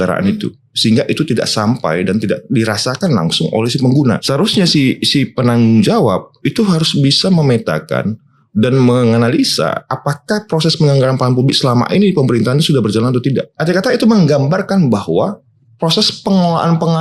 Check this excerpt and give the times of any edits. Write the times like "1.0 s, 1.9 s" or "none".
4.2 s, 13.5 s

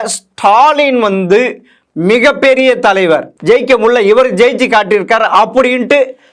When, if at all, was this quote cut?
3.3 s

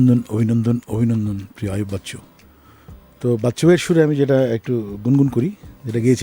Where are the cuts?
none

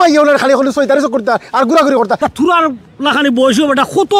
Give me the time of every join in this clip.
2.2 s

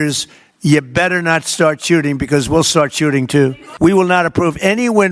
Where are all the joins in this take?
3.6 s

